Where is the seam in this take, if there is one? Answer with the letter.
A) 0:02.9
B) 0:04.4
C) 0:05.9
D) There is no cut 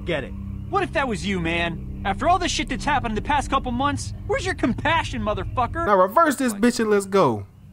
C